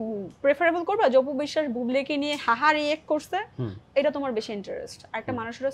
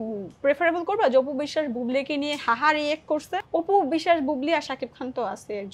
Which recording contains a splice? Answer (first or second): second